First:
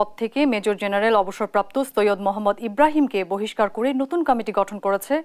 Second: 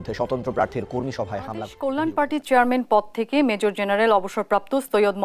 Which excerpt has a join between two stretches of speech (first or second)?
second